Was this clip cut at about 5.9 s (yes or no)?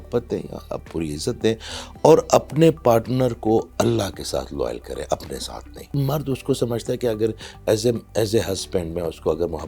yes